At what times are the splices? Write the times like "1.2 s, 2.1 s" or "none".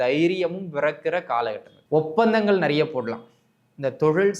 1.7 s